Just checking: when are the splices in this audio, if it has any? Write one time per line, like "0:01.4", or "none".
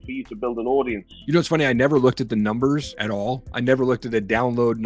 0:01.1
0:03.0